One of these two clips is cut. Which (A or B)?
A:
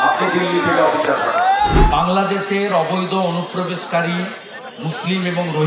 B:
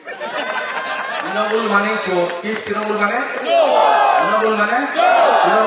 A